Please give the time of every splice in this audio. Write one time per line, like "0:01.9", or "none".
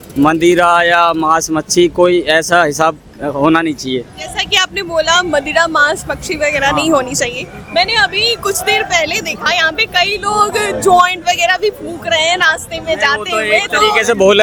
none

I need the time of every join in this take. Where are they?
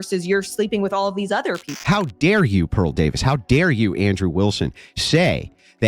0:01.7

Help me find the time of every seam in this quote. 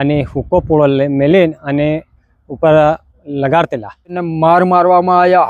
0:04.2

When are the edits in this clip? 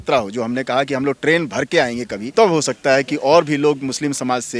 0:02.2

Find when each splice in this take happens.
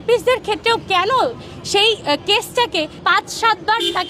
none

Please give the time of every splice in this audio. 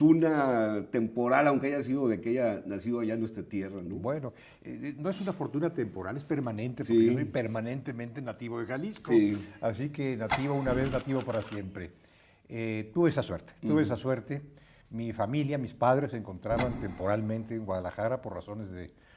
none

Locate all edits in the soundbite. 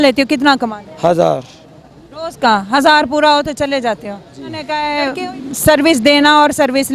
0:04.9

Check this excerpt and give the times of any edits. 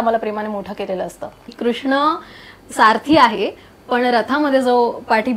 0:01.5

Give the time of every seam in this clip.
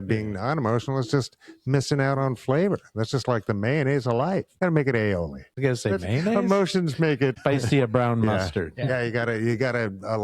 0:04.5
0:05.4
0:07.3

